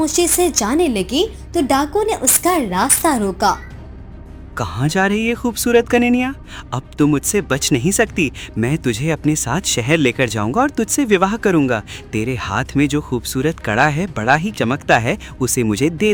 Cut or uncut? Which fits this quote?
uncut